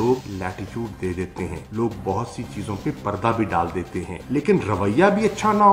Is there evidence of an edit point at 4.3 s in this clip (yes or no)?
no